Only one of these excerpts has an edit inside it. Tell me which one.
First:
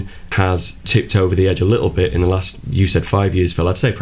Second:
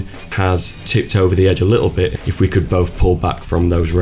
second; 1 cut; at 2.1 s

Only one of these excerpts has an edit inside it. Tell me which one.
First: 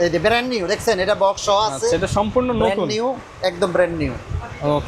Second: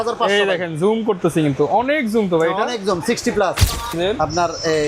second; 1 cut; at 3.9 s

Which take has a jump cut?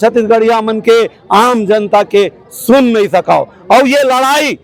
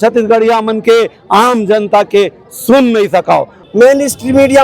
second; 1 cut; at 3.6 s

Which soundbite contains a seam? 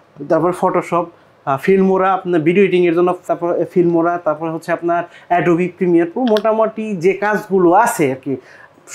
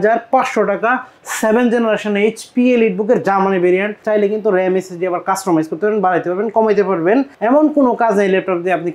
second; 2 cuts; at 4.0 s, 7.3 s

